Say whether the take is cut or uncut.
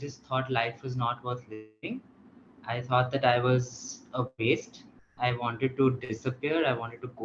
uncut